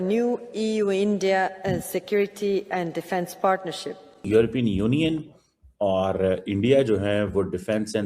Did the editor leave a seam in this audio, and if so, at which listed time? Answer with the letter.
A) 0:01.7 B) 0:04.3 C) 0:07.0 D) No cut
B